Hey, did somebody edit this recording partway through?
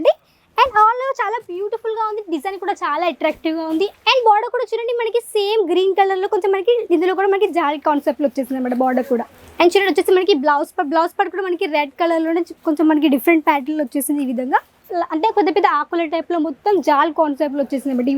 yes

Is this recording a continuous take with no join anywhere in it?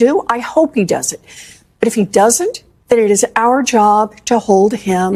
yes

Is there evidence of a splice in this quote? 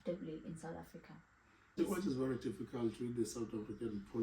yes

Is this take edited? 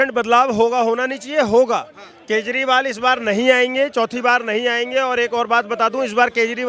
no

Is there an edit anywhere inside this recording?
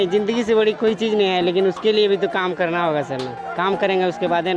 no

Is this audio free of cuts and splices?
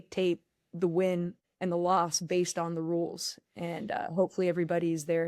yes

